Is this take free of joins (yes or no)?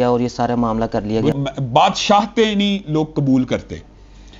no